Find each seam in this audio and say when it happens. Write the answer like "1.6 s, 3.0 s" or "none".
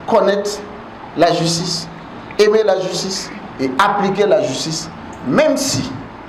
none